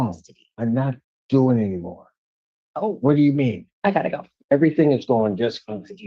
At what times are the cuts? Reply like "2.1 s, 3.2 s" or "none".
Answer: 3.7 s

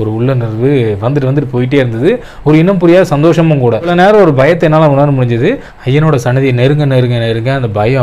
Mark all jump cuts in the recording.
3.9 s

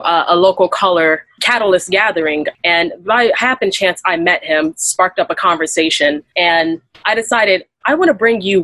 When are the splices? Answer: 2.5 s, 6.3 s

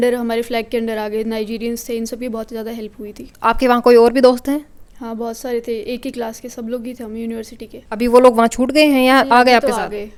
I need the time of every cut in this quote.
none

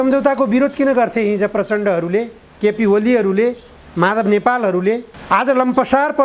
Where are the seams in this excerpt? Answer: 5.1 s

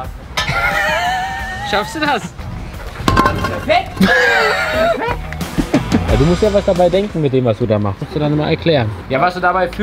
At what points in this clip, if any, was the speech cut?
2.4 s, 6.0 s

